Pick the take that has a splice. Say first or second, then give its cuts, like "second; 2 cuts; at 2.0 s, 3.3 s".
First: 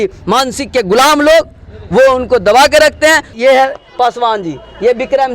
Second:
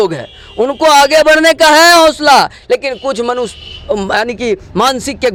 first; 1 cut; at 3.3 s